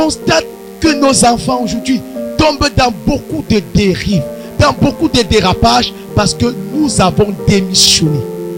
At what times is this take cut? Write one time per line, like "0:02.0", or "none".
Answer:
none